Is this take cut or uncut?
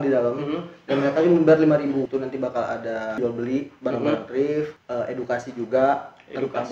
cut